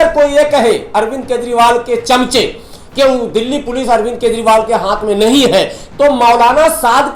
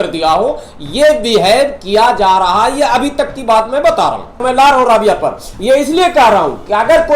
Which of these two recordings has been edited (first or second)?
second